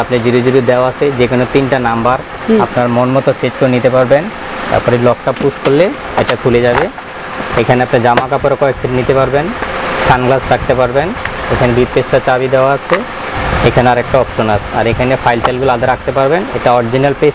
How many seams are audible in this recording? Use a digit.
0